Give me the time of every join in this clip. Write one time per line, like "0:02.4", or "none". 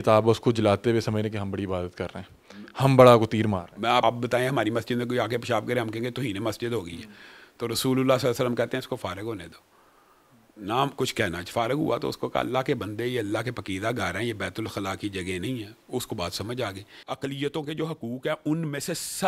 0:04.0
0:16.9